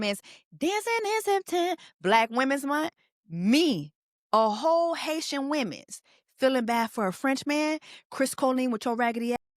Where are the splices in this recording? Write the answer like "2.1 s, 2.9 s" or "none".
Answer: none